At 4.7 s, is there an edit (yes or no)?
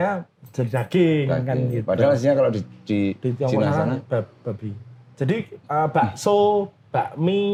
no